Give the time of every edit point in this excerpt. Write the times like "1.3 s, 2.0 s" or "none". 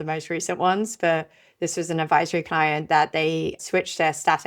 3.6 s